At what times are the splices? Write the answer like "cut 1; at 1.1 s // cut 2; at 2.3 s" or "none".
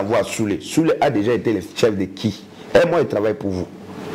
none